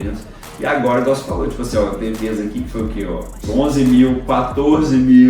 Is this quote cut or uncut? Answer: cut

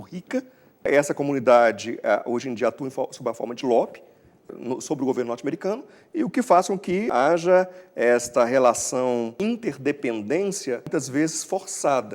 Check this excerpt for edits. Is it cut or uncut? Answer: cut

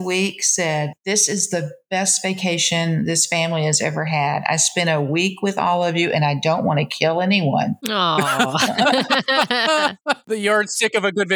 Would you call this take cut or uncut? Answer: cut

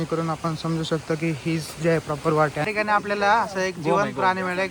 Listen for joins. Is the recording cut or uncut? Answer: cut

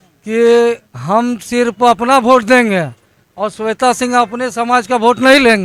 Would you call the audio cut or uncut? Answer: uncut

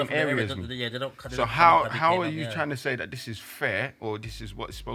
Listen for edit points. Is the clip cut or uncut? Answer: uncut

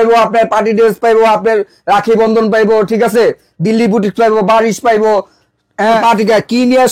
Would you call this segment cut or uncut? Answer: cut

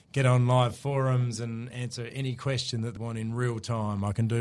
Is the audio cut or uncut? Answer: cut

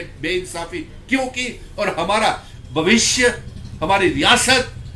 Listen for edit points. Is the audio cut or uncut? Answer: uncut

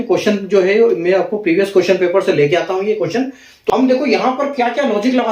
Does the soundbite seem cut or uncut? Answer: cut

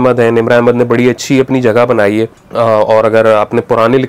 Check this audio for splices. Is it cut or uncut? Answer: cut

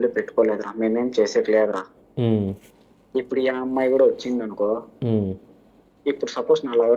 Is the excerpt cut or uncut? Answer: uncut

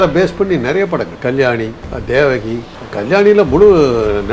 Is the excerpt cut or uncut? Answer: cut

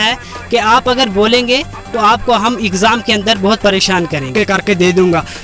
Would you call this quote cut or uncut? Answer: cut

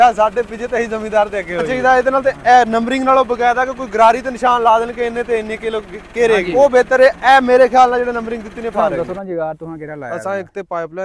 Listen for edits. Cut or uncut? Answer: cut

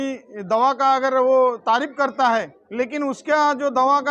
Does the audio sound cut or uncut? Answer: cut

